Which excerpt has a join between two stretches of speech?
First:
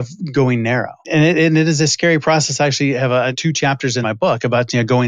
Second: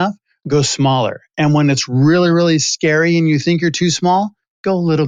first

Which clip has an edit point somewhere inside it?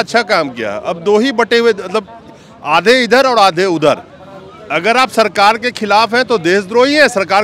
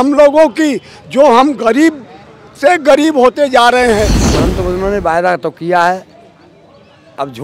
second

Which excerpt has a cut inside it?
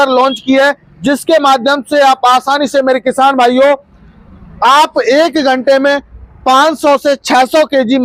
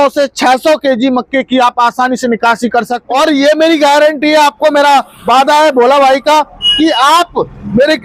second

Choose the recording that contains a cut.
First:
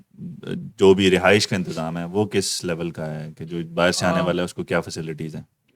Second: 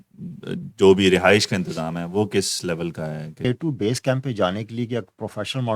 second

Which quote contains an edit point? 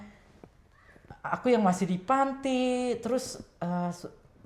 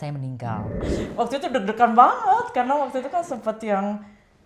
second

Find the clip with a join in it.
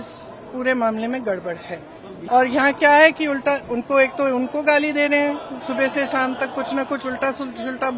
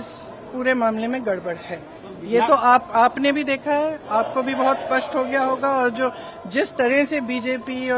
first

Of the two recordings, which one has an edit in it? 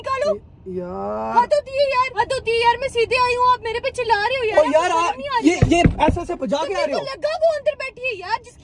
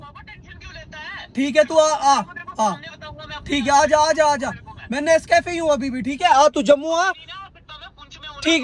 first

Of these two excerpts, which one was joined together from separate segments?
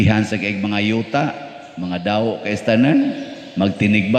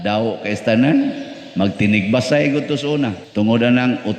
second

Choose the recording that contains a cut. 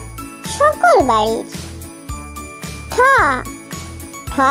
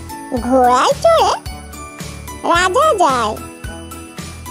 second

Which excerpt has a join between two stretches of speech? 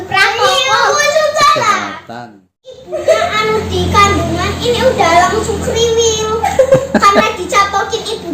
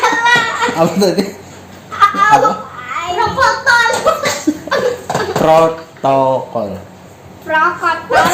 first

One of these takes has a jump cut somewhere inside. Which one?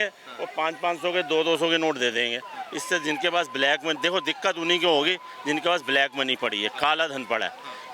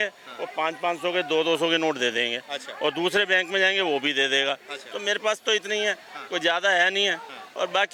first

